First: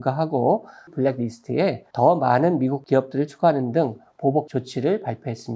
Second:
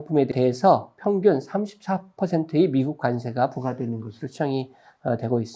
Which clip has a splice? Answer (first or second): first